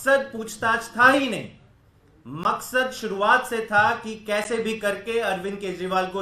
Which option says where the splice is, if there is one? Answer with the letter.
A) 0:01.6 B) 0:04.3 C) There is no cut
C